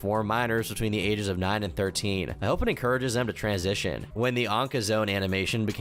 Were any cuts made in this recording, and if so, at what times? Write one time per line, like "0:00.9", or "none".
none